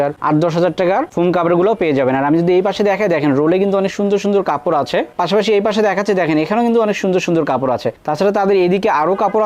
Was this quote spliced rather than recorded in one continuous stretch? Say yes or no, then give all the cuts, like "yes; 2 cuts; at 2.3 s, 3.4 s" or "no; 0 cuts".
no; 0 cuts